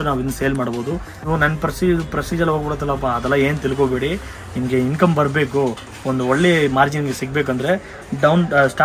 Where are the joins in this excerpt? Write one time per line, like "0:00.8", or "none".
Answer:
0:01.1